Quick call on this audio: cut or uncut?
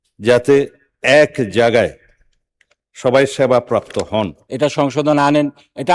cut